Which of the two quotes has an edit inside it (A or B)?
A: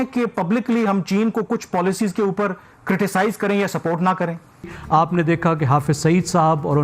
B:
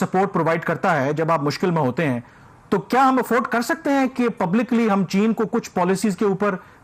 A